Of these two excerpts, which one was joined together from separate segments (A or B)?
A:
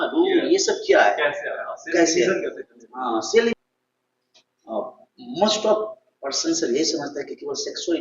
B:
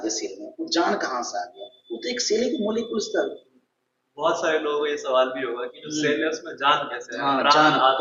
A